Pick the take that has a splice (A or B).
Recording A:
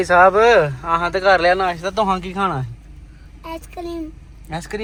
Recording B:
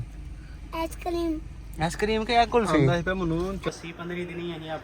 B